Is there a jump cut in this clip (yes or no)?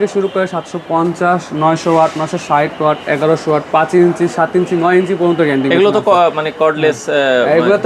no